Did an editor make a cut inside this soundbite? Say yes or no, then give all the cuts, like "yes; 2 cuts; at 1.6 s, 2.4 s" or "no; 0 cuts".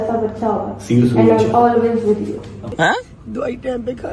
yes; 1 cut; at 2.6 s